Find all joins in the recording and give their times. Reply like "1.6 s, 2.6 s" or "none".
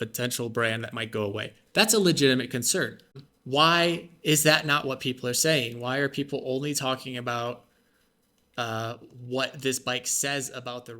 3.0 s